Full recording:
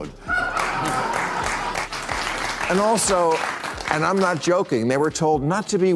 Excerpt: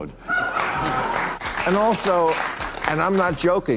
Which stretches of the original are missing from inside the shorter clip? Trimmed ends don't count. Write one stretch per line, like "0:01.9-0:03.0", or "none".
0:01.4-0:02.4

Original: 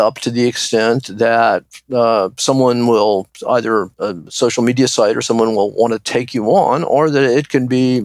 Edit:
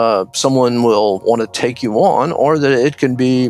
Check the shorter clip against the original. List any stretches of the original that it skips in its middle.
0:03.2-0:05.7

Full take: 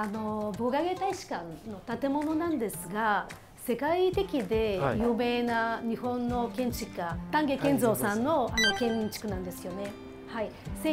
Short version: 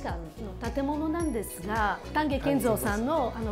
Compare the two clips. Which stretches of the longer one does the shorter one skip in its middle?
0:03.3-0:07.2

